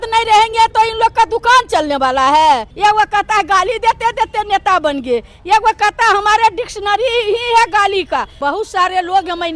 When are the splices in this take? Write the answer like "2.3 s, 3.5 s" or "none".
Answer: 2.7 s, 8.3 s